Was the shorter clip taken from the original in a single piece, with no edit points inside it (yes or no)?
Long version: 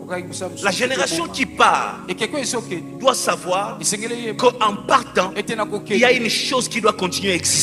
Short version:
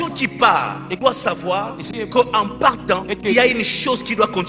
no